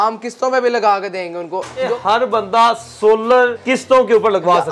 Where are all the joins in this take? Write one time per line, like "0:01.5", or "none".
0:01.9
0:03.6